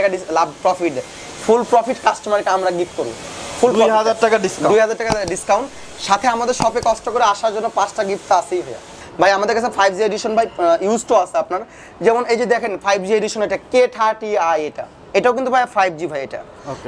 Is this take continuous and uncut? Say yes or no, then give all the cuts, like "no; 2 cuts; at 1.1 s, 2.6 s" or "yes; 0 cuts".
yes; 0 cuts